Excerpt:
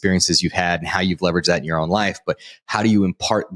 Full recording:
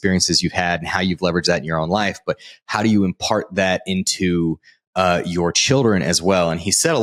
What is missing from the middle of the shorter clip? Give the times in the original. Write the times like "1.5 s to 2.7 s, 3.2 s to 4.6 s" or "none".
none

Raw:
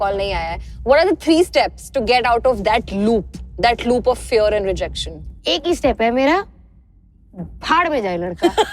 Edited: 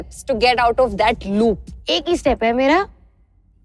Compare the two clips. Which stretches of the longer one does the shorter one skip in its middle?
3.4 s to 5.3 s

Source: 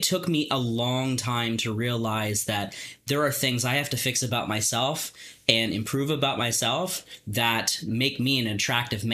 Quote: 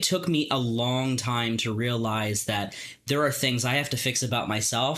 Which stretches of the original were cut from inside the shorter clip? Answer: none

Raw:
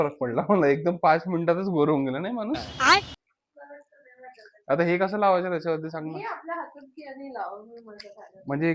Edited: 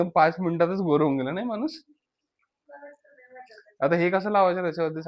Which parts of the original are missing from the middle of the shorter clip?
none

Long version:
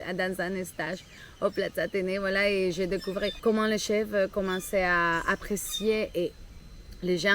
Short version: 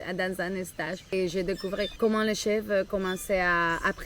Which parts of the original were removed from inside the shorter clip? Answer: 1.1 s to 2.6 s

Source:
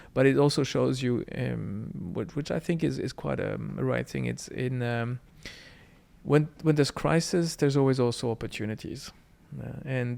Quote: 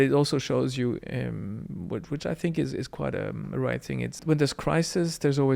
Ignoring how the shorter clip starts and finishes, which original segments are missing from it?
4.4 s to 6.5 s

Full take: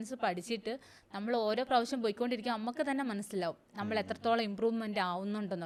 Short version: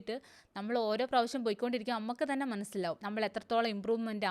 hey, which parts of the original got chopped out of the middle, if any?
3.6 s to 3.8 s

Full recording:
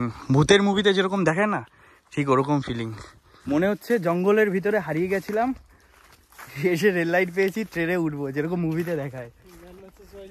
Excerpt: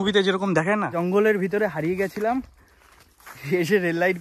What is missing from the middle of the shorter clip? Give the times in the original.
1.7 s to 4.1 s

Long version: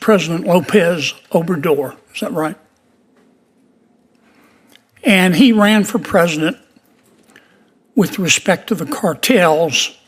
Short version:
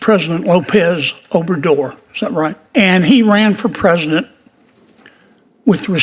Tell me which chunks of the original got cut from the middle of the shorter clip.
2.6 s to 4.9 s

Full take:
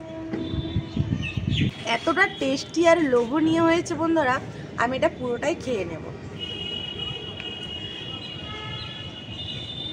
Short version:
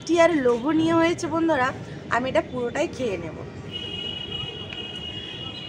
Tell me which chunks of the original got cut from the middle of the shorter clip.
none

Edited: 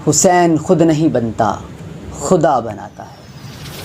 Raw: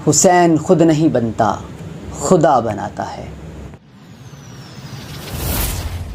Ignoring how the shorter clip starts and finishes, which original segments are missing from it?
2.9 s to 4.4 s

